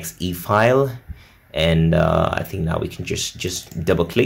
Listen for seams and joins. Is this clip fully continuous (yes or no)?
yes